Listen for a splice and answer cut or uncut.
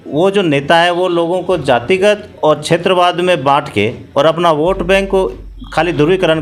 uncut